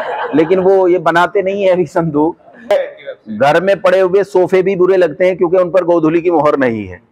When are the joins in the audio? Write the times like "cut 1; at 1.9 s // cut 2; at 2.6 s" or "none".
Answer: cut 1; at 2.7 s